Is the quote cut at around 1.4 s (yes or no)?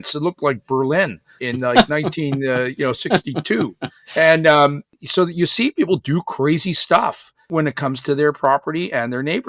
yes